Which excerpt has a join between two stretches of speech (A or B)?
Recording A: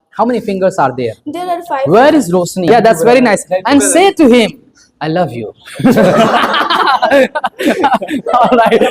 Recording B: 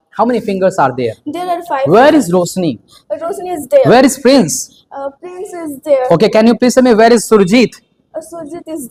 A